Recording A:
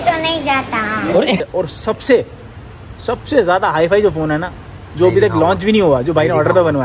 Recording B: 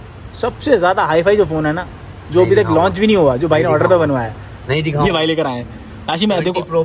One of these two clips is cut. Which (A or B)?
A